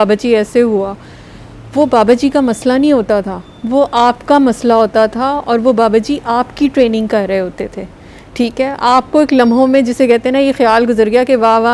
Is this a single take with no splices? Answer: yes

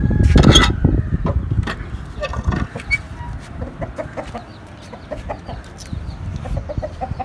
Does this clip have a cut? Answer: no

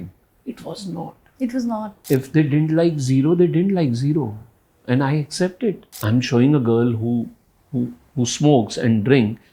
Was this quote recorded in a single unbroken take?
no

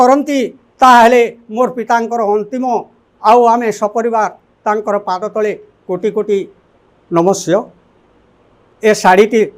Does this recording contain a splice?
no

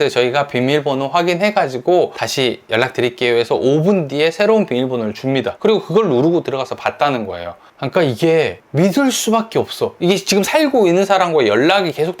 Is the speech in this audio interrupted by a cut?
yes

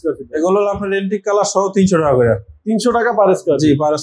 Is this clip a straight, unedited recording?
yes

